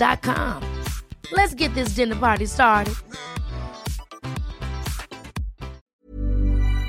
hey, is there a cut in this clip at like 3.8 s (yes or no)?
no